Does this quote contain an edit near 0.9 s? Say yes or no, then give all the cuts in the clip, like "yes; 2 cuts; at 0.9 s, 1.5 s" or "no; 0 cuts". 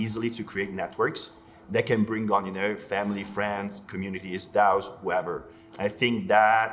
no; 0 cuts